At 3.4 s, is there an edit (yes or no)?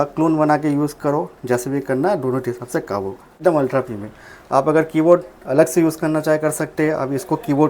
yes